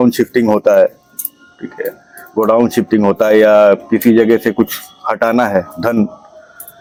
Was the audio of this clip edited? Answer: no; 0 cuts

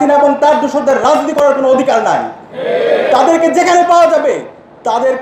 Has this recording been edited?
no; 0 cuts

